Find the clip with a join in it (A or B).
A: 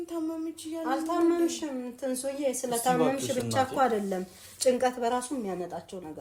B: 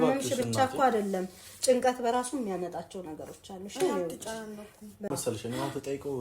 B